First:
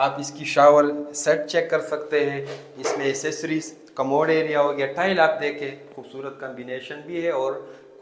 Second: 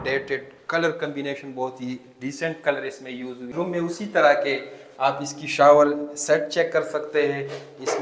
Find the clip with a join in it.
second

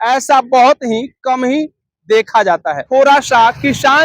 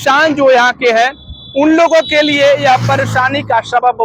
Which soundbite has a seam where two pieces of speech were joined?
first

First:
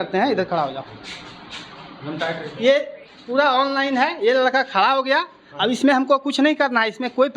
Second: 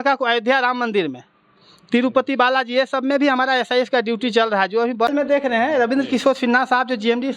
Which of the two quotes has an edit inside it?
second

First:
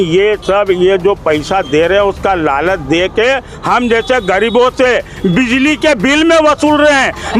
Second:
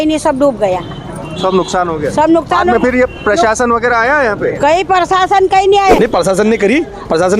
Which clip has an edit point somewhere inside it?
second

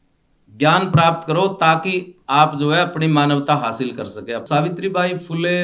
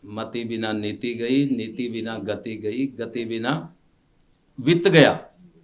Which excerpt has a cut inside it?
first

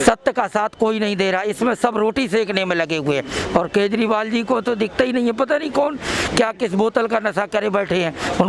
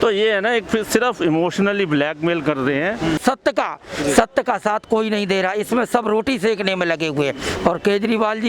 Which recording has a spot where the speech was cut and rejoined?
second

